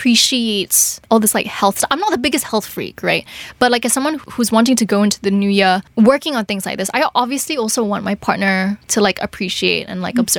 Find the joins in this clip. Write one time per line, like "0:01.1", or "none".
none